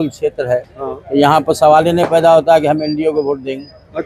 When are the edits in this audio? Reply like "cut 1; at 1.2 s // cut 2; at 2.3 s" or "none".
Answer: none